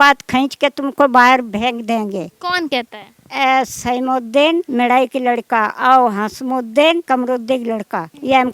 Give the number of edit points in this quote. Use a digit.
0